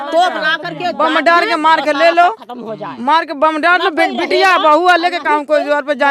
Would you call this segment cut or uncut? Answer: uncut